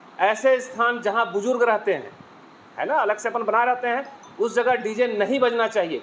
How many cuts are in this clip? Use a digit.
0